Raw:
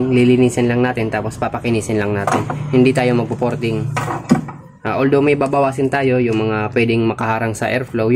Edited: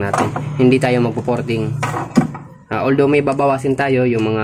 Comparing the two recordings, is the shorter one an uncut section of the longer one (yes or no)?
yes